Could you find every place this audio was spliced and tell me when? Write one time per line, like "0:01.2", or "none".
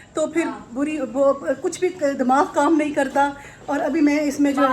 none